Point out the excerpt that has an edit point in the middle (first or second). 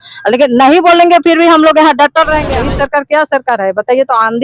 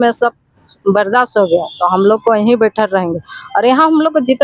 first